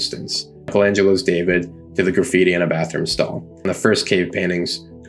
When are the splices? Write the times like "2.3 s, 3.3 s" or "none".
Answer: 3.7 s